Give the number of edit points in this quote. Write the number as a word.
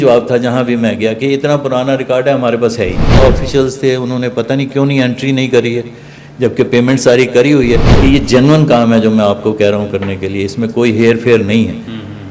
two